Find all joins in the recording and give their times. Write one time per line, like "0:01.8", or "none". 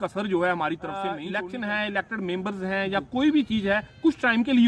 0:01.2